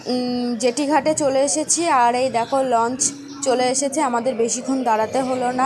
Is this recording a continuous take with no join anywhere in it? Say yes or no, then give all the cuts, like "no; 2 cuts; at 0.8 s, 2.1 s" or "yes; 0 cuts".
yes; 0 cuts